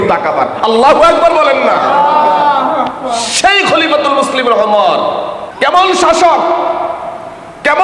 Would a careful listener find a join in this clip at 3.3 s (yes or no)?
no